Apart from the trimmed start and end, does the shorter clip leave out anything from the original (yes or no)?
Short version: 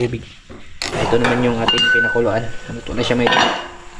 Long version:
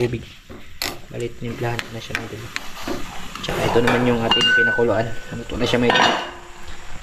yes